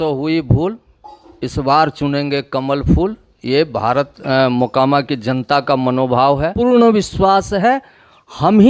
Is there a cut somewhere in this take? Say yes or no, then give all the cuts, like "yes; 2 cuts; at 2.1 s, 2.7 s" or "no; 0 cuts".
yes; 1 cut; at 6.5 s